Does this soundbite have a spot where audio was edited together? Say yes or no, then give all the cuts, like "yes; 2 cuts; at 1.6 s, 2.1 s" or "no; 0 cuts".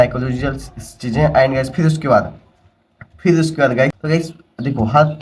yes; 1 cut; at 4.0 s